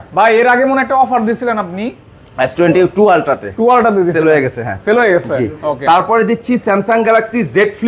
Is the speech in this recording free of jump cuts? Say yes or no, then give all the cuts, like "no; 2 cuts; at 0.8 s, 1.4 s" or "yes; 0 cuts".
yes; 0 cuts